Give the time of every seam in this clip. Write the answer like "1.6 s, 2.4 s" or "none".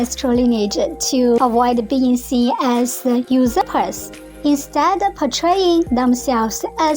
1.4 s